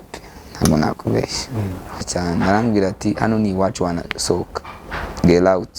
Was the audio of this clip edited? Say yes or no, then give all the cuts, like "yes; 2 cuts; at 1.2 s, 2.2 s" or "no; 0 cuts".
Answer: yes; 1 cut; at 2.0 s